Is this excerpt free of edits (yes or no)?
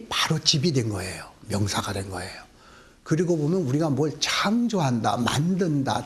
no